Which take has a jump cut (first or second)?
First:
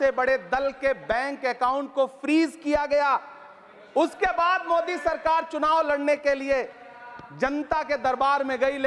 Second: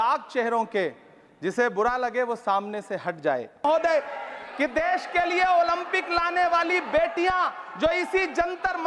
second